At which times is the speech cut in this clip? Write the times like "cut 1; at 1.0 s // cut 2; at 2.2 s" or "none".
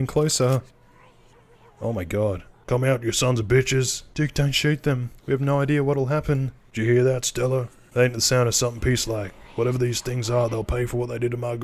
cut 1; at 2.5 s // cut 2; at 4.0 s // cut 3; at 6.6 s // cut 4; at 7.8 s